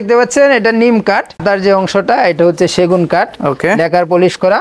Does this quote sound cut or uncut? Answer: cut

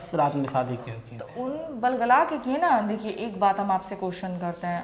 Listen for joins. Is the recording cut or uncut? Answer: uncut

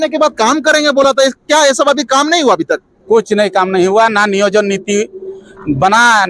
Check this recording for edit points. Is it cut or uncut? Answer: uncut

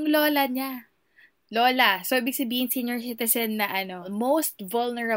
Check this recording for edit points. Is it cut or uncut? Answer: cut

